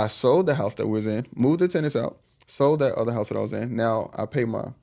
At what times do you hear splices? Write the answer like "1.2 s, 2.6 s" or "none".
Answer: none

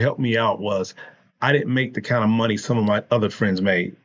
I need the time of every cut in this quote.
none

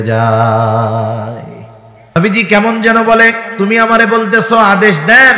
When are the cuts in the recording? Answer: 2.2 s

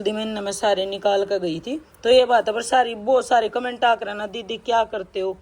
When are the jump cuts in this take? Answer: none

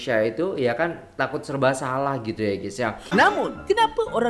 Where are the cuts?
3.1 s

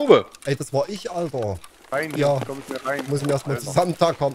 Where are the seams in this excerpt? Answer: 1.9 s

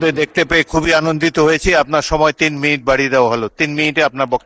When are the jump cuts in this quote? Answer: none

